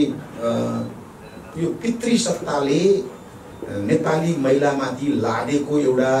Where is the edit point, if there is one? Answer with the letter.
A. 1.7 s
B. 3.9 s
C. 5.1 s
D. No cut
D